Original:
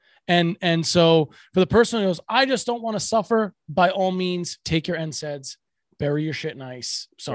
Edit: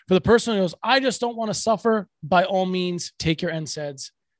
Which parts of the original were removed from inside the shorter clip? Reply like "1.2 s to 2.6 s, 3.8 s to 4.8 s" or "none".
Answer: none